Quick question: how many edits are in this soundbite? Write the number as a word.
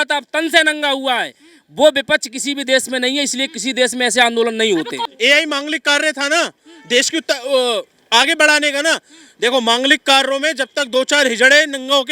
one